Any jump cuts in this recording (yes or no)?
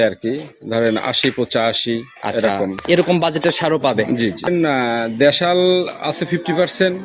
yes